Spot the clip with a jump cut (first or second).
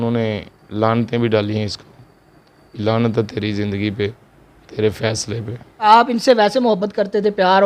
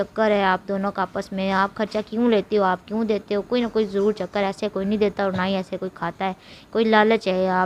first